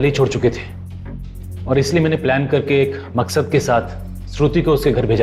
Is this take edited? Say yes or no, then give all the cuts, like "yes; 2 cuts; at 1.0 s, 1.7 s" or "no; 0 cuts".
no; 0 cuts